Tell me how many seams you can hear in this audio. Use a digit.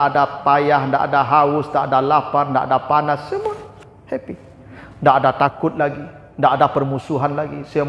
0